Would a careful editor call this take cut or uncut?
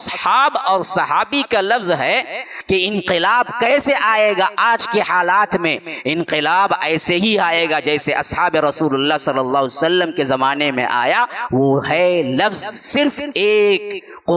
cut